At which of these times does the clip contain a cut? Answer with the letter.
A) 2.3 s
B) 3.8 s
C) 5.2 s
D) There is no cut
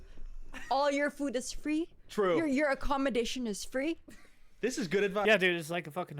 D